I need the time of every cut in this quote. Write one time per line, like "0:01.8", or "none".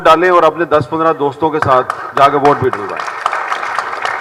none